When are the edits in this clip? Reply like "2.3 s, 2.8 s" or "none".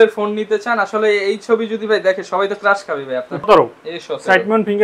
3.4 s